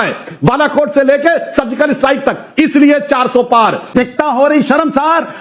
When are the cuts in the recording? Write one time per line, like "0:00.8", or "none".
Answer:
0:03.8